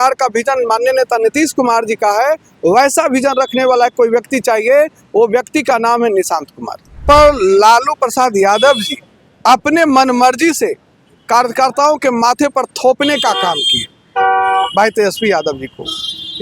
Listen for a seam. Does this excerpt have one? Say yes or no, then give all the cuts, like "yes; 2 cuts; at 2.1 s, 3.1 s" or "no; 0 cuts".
yes; 1 cut; at 7.0 s